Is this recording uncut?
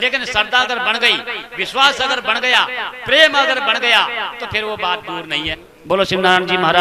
no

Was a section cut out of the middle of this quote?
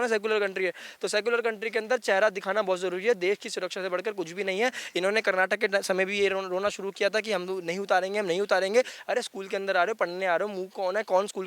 no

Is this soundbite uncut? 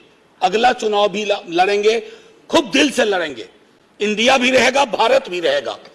yes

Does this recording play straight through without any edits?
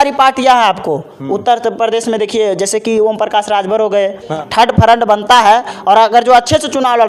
no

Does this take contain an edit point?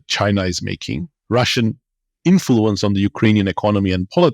yes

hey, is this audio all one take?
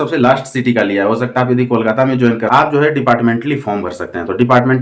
no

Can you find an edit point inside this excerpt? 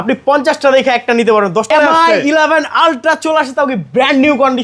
yes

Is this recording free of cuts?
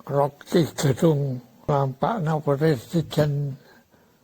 no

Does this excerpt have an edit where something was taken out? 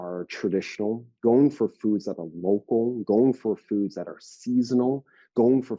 no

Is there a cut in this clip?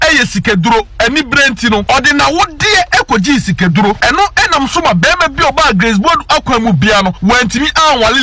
yes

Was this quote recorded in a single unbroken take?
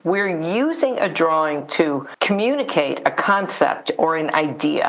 no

